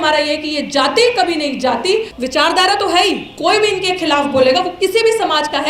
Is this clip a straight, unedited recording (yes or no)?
no